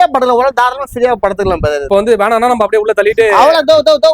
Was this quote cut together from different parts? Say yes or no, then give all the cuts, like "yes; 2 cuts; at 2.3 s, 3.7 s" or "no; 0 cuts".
yes; 1 cut; at 1.8 s